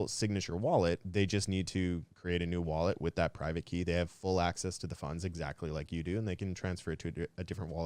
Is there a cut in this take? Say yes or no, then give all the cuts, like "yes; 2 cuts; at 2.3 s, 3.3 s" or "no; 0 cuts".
yes; 2 cuts; at 1.1 s, 2.1 s